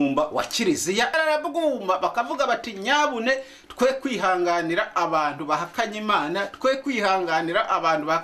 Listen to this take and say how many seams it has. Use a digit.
1